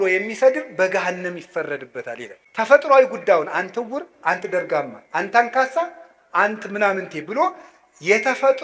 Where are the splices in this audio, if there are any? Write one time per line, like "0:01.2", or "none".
0:02.4